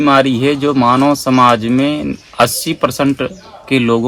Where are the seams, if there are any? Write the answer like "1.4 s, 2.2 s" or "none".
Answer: none

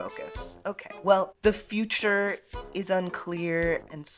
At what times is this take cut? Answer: 1.3 s

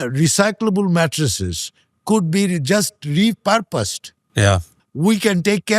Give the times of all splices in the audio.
4.8 s

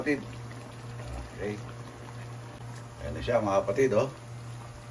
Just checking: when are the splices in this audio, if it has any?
2.6 s

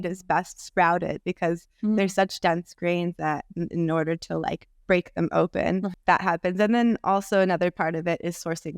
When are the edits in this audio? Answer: 5.9 s

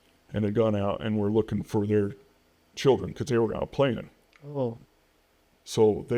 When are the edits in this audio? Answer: none

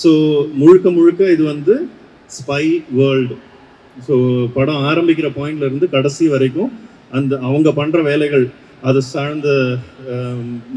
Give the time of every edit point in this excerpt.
none

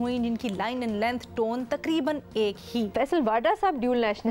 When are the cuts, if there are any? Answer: 2.9 s

